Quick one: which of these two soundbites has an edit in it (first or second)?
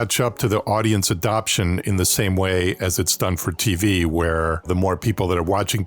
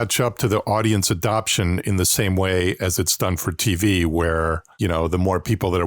first